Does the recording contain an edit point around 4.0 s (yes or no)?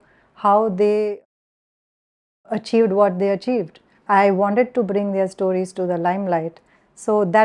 yes